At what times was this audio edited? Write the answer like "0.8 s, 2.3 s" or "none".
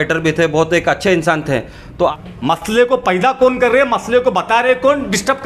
2.1 s